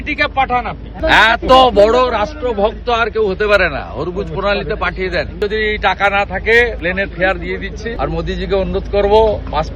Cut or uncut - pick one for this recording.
cut